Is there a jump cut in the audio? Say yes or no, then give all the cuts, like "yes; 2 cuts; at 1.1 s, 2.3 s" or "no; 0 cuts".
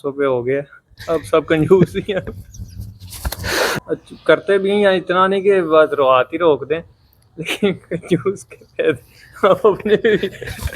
yes; 1 cut; at 3.8 s